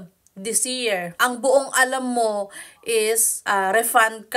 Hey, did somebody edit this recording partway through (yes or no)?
yes